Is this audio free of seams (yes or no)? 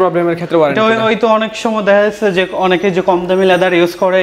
yes